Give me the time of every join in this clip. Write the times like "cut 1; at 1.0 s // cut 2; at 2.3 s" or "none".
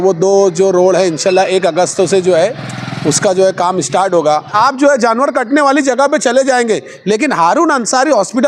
cut 1; at 4.5 s